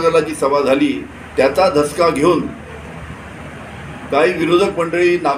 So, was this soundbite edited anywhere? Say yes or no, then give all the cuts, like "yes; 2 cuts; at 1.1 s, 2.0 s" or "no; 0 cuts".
no; 0 cuts